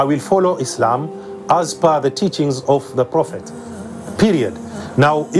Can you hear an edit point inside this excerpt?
no; 0 cuts

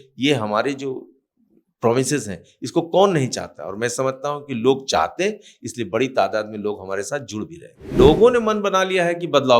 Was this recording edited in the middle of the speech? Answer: yes; 1 cut; at 7.9 s

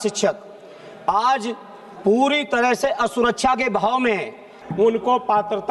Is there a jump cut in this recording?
yes; 1 cut; at 4.6 s

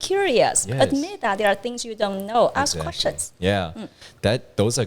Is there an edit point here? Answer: no; 0 cuts

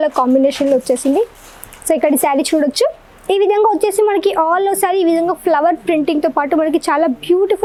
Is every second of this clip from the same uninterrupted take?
yes; 0 cuts

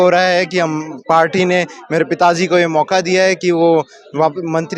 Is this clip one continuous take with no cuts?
yes; 0 cuts

